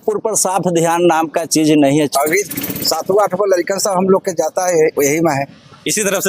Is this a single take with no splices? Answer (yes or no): no